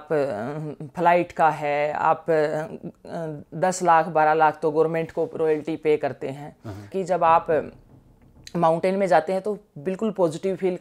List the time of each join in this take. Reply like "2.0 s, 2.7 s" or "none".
6.9 s